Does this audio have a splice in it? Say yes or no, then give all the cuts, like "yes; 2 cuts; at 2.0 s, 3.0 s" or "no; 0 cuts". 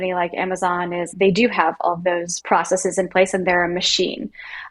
yes; 2 cuts; at 1.1 s, 2.3 s